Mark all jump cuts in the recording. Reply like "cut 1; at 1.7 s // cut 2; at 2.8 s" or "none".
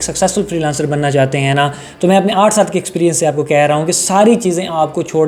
none